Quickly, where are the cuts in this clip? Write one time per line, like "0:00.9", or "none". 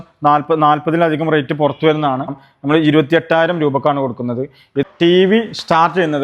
0:02.5
0:04.8